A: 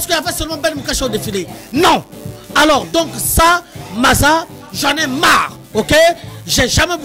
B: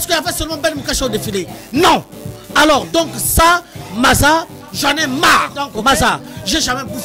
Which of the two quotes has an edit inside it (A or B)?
B